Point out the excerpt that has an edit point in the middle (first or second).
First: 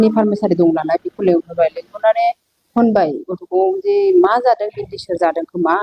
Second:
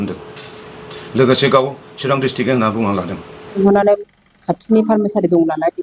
second